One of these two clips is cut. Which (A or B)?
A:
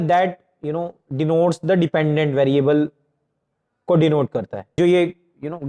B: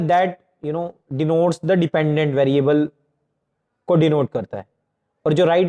A